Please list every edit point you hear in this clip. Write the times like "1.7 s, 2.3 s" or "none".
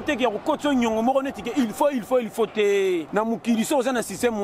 3.1 s